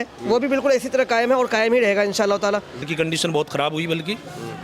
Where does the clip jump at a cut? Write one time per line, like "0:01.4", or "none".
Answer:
0:02.9